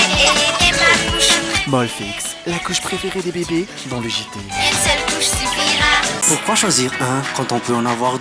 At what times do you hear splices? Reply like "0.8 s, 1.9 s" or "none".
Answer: 6.2 s